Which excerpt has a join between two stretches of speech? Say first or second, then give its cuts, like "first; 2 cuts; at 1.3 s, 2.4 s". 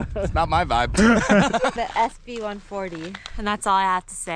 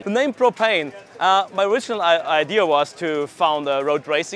first; 1 cut; at 1.8 s